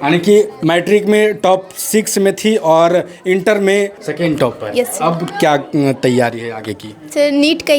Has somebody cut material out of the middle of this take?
yes; 1 cut; at 4.0 s

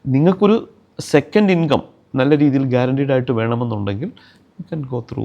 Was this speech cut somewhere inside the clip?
no; 0 cuts

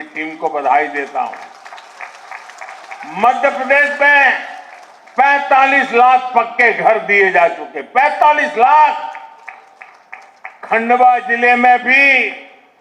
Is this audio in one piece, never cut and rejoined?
yes; 0 cuts

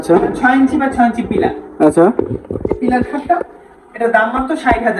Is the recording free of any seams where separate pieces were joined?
yes; 0 cuts

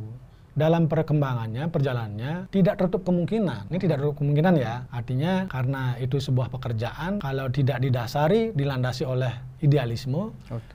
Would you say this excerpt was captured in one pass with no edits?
no; 5 cuts; at 2.4 s, 3.6 s, 4.9 s, 5.5 s, 7.2 s

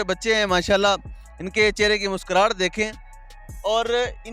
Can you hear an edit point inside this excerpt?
no; 0 cuts

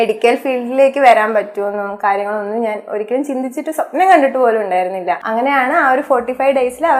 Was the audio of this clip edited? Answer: yes; 1 cut; at 5.2 s

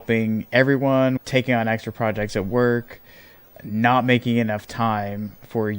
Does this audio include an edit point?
yes; 1 cut; at 1.2 s

